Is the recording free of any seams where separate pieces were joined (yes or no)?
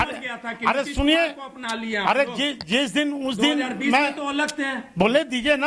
yes